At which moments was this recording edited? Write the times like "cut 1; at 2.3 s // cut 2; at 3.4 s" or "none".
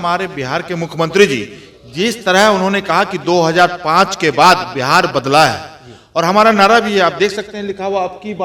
none